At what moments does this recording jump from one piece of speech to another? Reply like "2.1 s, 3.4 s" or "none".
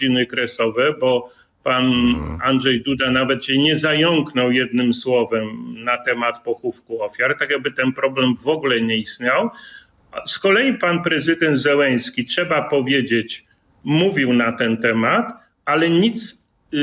none

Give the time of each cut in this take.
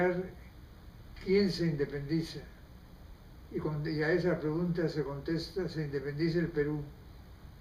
none

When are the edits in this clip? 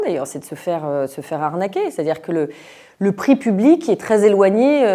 none

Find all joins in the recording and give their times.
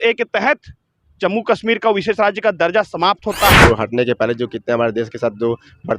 3.6 s

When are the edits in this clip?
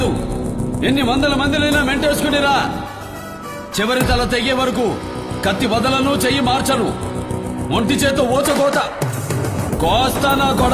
none

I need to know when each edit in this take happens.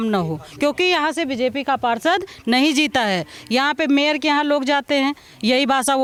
none

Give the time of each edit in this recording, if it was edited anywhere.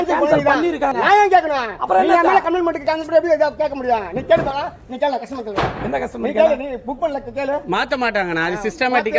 0.9 s

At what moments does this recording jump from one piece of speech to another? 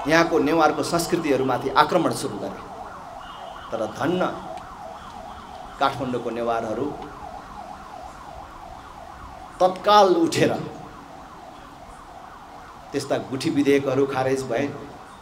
none

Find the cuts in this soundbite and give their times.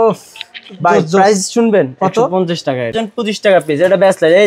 2.9 s

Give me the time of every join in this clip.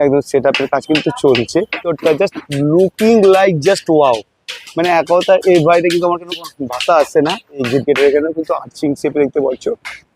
1.9 s, 7.6 s

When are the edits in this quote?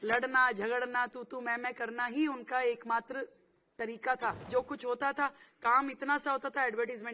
4.5 s

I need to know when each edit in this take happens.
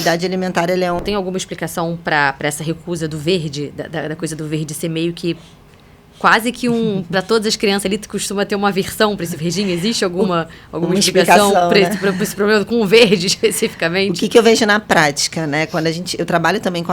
1.0 s

